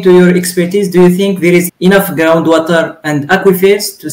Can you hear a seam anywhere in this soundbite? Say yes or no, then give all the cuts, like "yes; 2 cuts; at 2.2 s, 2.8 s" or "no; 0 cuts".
yes; 1 cut; at 1.7 s